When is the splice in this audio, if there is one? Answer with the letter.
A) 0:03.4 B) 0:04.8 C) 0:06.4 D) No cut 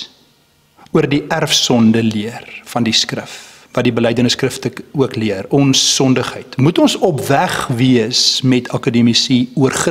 D